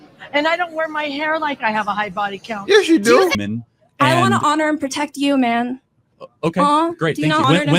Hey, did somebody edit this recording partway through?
yes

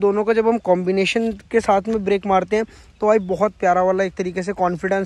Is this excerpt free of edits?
yes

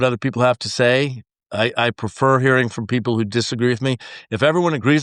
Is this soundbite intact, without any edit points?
yes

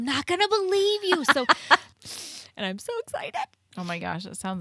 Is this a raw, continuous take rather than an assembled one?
no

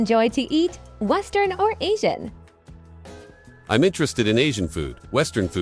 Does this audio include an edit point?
no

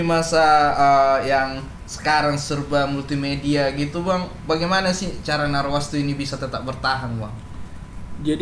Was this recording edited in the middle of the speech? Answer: no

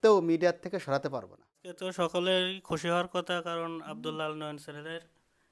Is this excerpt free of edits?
no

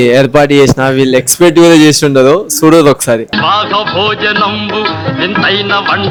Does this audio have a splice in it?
no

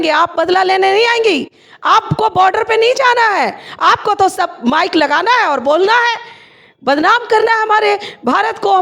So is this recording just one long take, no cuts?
yes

